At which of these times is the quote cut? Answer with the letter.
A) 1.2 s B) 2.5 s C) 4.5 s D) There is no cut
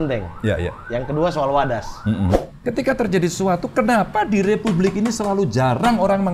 B